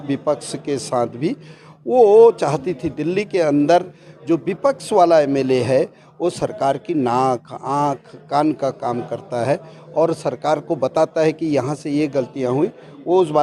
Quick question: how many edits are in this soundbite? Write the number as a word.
zero